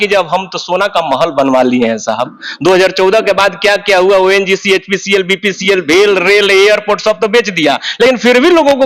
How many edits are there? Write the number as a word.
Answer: zero